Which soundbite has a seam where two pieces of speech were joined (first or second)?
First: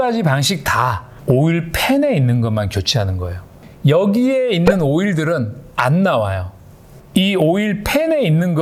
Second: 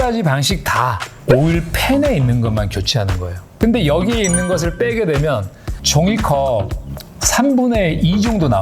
second